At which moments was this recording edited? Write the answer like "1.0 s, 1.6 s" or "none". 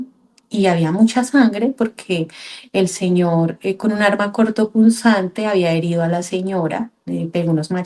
none